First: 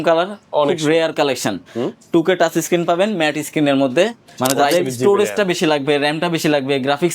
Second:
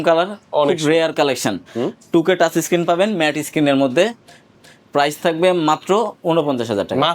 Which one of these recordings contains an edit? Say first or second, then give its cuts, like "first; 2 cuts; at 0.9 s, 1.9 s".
first; 1 cut; at 4.3 s